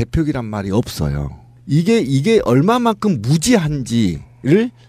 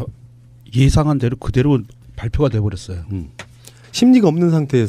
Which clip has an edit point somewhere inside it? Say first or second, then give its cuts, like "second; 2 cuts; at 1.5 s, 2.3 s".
first; 1 cut; at 3.1 s